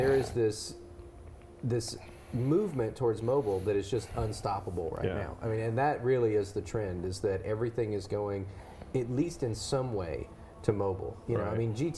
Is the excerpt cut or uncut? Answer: cut